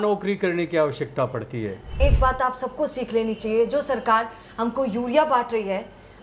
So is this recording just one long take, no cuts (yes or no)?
no